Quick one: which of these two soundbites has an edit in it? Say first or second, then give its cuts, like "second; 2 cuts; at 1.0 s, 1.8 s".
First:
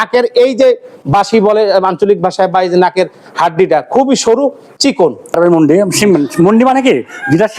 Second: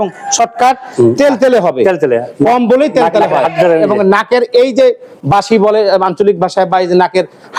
first; 1 cut; at 5.3 s